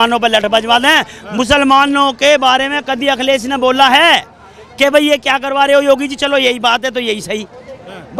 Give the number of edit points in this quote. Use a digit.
0